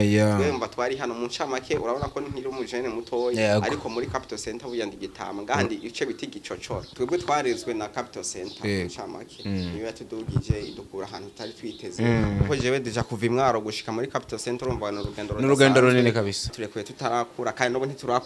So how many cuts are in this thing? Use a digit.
2